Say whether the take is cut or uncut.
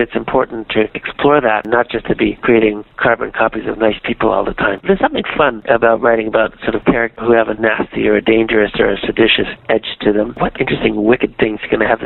cut